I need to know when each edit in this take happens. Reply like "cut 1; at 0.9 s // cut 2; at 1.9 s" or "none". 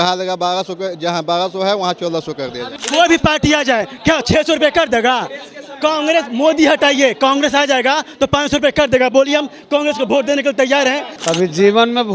cut 1; at 2.8 s // cut 2; at 11.1 s